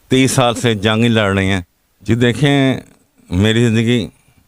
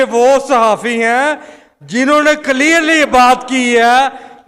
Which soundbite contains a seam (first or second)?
first